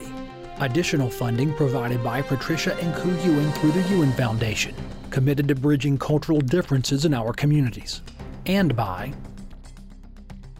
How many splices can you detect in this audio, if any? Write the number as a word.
one